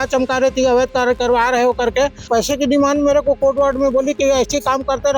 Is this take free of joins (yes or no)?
no